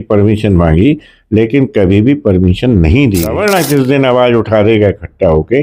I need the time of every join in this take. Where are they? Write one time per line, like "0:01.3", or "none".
0:03.3